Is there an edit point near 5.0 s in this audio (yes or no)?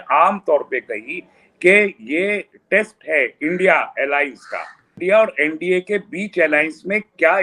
yes